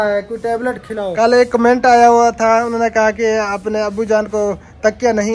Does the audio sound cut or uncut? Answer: cut